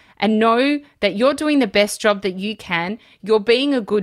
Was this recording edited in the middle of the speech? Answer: yes; 1 cut; at 3.1 s

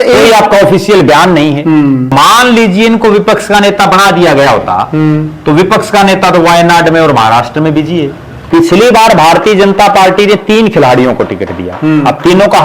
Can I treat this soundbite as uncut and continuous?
no; 2 cuts; at 2.1 s, 8.4 s

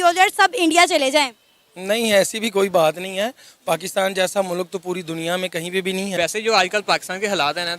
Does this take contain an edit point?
yes; 1 cut; at 6.2 s

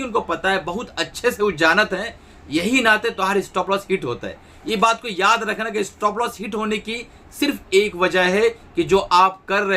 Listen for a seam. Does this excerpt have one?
no; 0 cuts

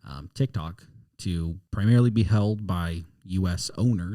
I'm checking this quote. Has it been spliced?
yes; 1 cut; at 1.6 s

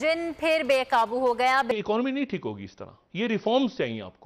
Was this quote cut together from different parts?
yes; 1 cut; at 1.7 s

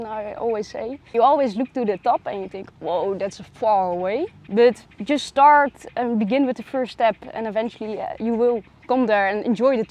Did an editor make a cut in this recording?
yes; 2 cuts; at 1.1 s, 4.4 s

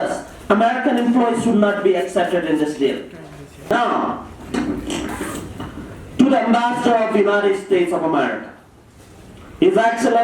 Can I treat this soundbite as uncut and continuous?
no; 1 cut; at 3.7 s

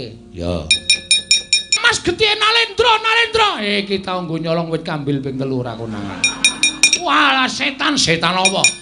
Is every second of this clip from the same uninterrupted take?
no; 1 cut; at 1.8 s

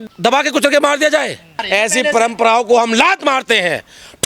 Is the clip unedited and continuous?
no; 1 cut; at 1.6 s

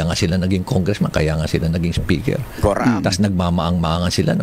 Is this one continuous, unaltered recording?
yes; 0 cuts

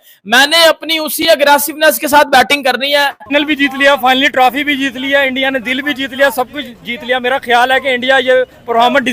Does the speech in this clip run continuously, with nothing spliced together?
no; 1 cut; at 3.3 s

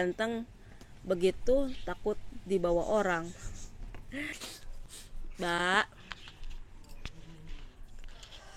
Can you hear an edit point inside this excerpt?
no; 0 cuts

